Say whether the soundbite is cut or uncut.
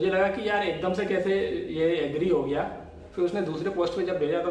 cut